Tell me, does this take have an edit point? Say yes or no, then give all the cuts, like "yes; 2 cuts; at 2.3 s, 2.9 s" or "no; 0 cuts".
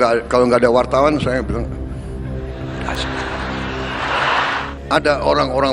no; 0 cuts